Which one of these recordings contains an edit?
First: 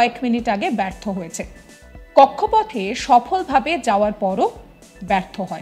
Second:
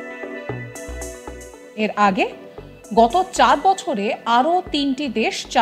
second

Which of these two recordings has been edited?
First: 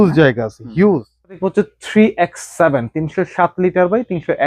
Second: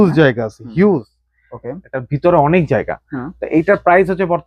first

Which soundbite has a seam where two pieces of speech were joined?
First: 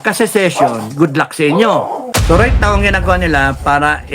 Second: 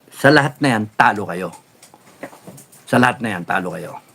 first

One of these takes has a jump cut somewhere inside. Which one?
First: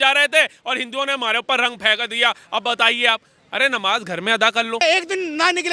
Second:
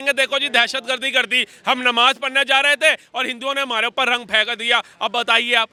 first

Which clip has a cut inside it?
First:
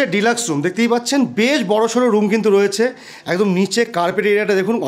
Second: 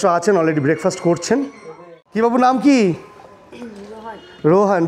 second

